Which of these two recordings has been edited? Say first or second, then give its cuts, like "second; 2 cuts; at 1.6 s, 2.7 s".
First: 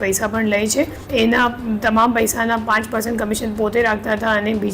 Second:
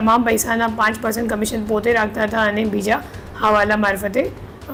first; 1 cut; at 1.0 s